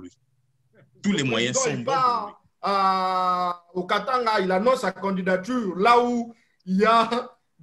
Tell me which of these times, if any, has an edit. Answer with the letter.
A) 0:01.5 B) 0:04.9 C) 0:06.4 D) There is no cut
A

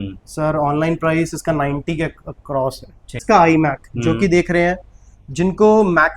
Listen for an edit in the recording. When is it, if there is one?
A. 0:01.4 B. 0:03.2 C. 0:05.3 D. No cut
B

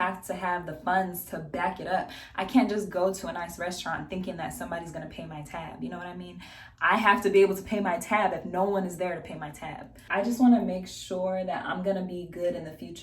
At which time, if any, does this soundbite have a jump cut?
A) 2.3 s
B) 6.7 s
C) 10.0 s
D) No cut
C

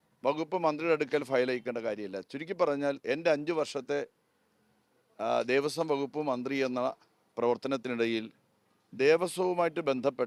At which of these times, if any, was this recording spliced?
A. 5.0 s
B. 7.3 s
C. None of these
C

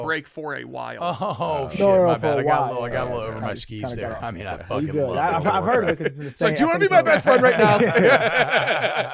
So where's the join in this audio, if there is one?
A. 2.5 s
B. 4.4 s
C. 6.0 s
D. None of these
D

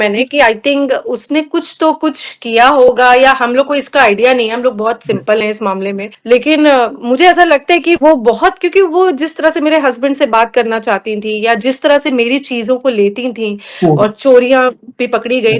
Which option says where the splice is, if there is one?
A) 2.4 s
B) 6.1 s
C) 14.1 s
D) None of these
B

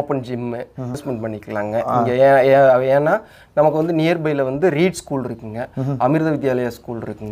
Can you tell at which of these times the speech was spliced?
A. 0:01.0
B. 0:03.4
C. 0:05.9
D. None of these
A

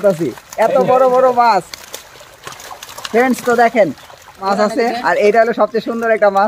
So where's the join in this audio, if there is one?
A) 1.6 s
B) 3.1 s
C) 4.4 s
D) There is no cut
C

